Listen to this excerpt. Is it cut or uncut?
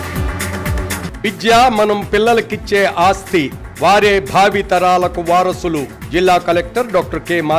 cut